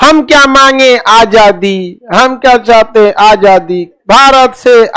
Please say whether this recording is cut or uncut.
uncut